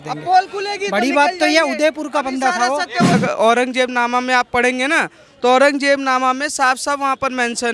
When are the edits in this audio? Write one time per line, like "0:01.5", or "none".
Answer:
0:03.2